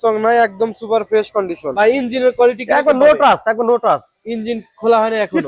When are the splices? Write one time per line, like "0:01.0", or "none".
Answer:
0:01.7